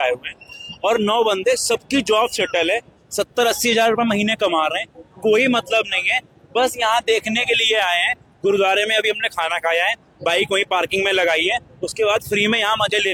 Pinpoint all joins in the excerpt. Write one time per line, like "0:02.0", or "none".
none